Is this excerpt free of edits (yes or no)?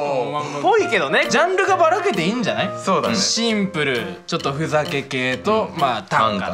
no